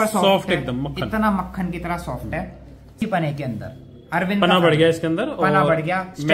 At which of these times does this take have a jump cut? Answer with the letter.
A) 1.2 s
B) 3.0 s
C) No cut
B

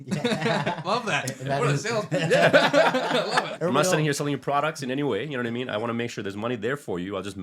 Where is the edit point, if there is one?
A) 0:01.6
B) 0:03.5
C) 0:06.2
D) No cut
B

